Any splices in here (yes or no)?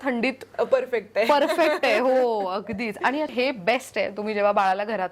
yes